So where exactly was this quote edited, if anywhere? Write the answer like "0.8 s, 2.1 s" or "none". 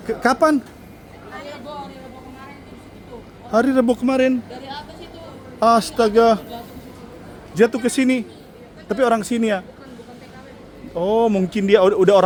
none